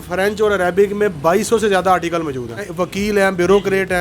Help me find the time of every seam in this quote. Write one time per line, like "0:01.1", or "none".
0:02.7

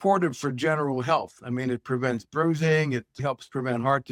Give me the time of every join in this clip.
0:03.1

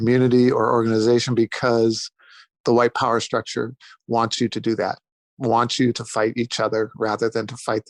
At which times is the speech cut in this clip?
none

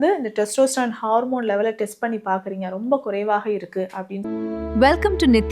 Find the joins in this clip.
0:04.2

